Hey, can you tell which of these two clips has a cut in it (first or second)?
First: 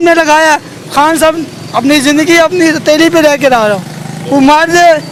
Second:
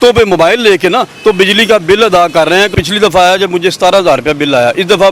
second